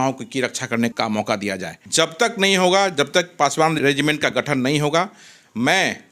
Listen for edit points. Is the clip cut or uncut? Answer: cut